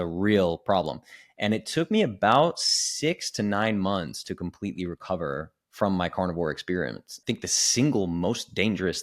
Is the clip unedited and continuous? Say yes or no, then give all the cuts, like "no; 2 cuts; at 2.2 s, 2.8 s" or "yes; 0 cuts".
no; 1 cut; at 7.2 s